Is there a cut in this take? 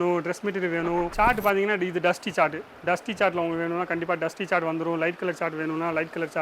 yes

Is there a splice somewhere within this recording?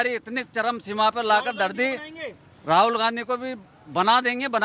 no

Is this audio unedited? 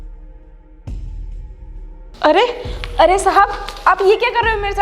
no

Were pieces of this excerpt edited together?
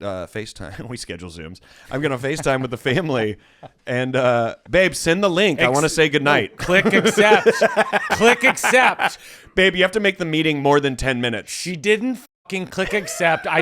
no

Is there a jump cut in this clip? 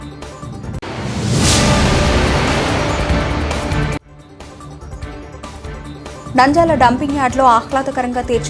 no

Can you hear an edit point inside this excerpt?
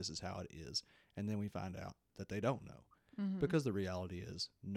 yes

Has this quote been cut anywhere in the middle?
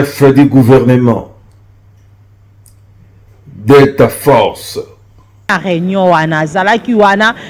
yes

